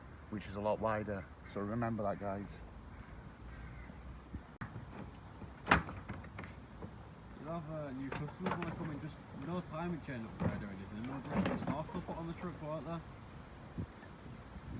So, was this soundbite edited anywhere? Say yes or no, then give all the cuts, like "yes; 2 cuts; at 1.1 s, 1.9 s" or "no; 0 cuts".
yes; 1 cut; at 4.6 s